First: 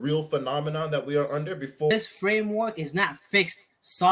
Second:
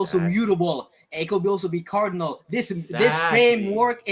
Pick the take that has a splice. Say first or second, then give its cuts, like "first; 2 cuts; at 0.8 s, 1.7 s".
first; 1 cut; at 1.9 s